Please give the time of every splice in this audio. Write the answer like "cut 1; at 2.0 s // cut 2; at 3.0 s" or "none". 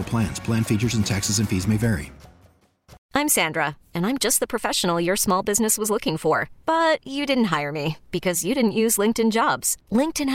cut 1; at 3.0 s